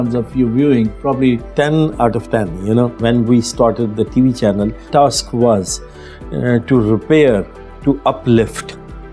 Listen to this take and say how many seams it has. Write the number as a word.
three